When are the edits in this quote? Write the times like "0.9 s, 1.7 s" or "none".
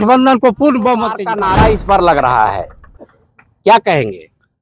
1.3 s